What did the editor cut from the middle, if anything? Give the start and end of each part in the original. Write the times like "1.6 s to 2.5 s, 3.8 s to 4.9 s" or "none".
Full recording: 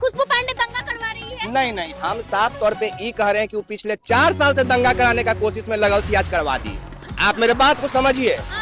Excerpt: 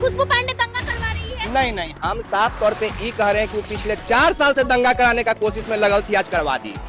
none